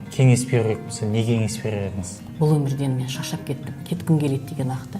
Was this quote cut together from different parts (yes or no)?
yes